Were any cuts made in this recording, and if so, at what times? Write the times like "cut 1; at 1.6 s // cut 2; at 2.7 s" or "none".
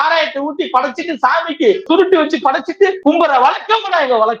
cut 1; at 1.9 s // cut 2; at 3.0 s